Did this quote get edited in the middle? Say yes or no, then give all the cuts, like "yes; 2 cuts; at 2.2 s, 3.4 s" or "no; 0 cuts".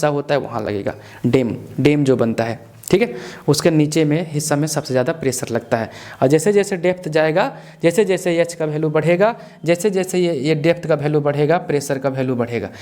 no; 0 cuts